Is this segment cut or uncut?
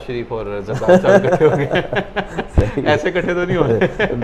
uncut